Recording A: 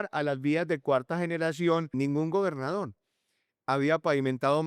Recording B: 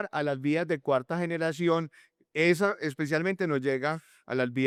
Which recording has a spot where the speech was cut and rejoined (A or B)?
A